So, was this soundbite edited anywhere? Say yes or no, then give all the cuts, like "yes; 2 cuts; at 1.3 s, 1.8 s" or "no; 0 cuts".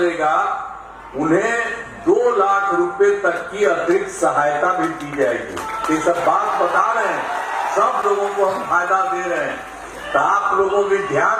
no; 0 cuts